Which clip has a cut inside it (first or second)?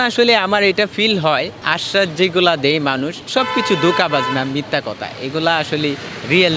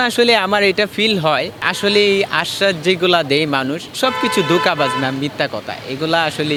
first